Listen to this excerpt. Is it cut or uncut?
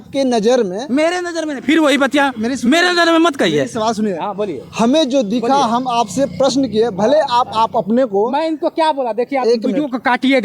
uncut